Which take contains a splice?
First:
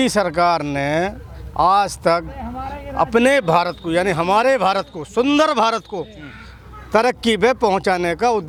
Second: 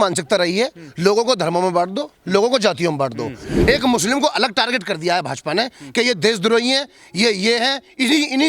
second; 1 cut; at 3.4 s

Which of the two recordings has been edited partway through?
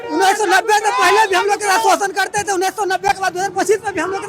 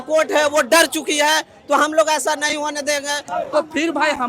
second; 1 cut; at 3.2 s

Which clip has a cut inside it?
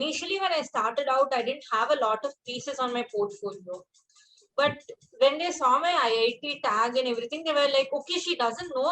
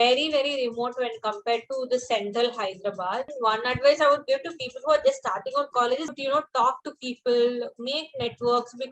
second; 2 cuts; at 3.3 s, 6.1 s

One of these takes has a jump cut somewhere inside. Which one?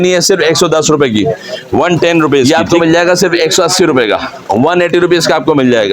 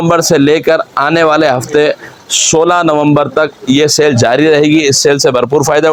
first; 1 cut; at 2.4 s

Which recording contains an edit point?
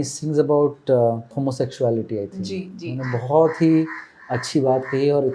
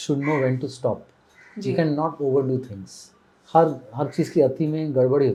first; 1 cut; at 1.4 s

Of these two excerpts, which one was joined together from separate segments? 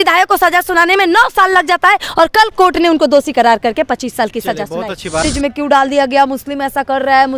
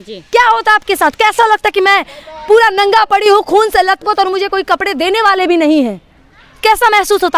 first; 1 cut; at 5.3 s

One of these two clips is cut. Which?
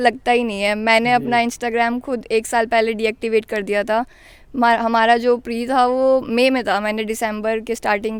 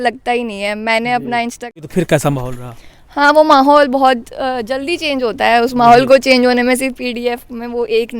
second; 1 cut; at 1.8 s

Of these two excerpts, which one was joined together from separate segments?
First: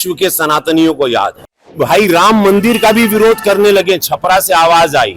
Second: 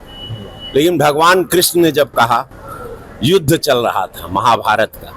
first; 1 cut; at 1.8 s

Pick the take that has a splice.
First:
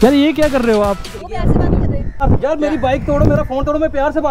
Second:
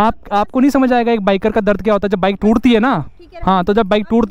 first; 2 cuts; at 1.1 s, 2.2 s

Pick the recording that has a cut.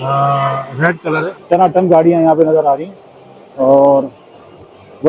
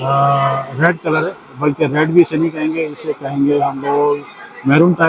first; 1 cut; at 1.3 s

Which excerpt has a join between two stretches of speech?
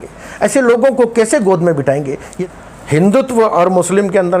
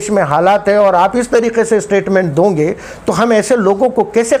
first; 1 cut; at 2.2 s

